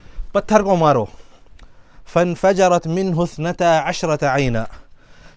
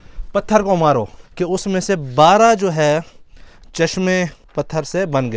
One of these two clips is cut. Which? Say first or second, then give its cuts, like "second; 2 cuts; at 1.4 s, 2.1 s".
second; 2 cuts; at 1.2 s, 4.4 s